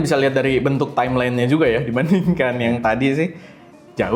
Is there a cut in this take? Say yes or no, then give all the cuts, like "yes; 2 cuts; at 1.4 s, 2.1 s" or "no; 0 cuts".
no; 0 cuts